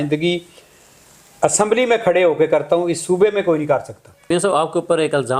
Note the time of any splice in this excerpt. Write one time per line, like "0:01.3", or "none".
0:04.3

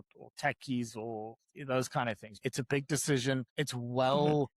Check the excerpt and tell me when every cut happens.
0:02.3
0:03.5

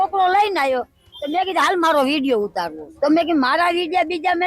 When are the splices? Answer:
0:02.8

